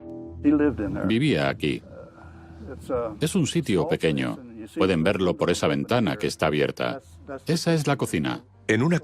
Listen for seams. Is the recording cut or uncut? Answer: cut